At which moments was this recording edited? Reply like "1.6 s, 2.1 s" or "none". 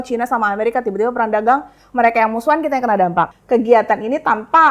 3.4 s